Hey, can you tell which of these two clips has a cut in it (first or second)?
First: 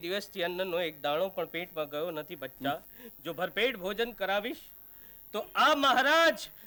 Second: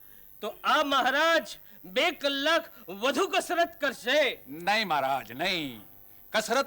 first